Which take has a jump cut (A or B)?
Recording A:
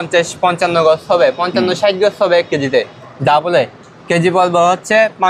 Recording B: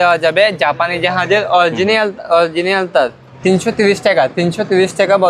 B